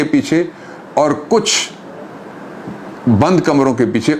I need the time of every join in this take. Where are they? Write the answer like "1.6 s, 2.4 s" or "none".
none